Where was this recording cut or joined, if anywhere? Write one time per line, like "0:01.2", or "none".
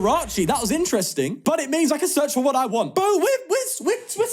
0:01.4
0:02.9